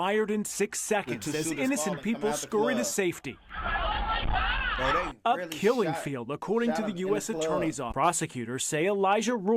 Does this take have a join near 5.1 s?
no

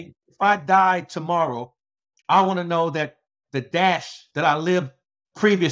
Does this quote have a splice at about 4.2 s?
yes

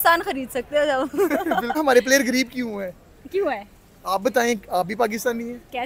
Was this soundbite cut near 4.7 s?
no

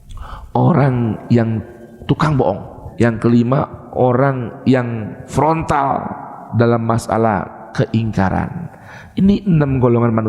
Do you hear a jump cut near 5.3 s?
yes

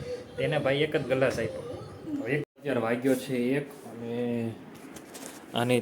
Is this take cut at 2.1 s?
yes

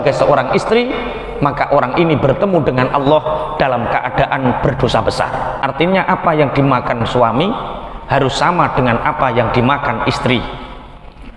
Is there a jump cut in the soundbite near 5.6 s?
yes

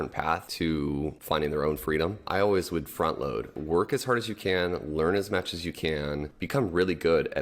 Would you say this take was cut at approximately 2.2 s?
yes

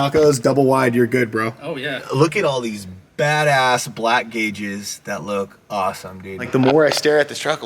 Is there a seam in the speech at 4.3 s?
no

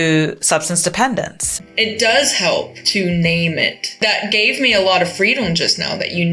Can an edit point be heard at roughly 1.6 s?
yes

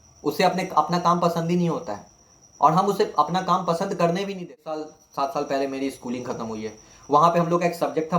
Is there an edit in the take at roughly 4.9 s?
yes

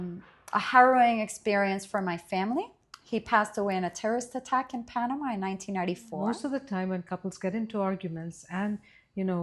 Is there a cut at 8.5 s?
no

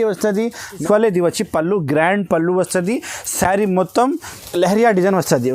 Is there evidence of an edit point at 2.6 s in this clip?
no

